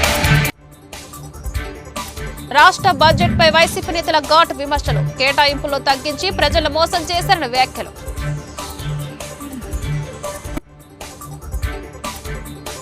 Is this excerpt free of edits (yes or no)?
yes